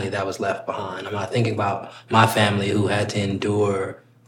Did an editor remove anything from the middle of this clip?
no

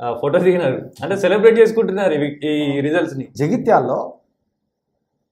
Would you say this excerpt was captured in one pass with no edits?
no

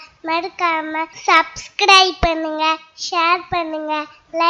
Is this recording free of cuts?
no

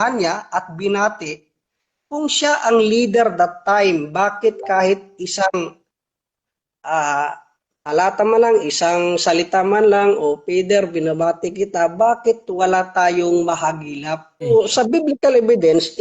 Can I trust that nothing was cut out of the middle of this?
no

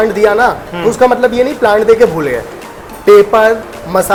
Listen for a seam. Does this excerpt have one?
no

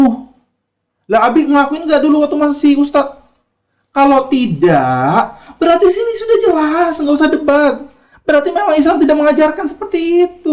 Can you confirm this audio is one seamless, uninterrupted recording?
yes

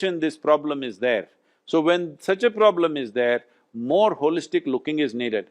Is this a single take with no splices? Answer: yes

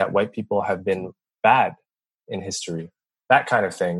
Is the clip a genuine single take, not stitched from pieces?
no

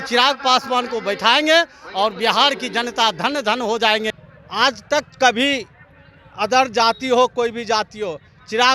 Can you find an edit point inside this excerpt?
yes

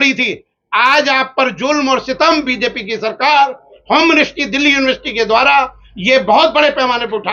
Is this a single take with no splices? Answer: yes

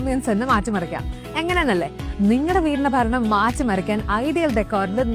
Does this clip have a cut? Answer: no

